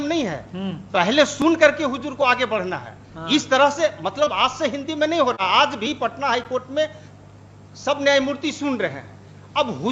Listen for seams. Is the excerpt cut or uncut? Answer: uncut